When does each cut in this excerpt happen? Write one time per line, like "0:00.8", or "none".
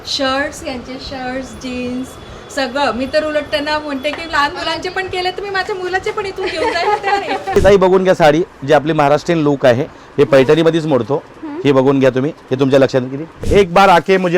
0:07.6
0:13.5